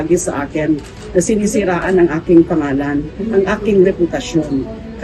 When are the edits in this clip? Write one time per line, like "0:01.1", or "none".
none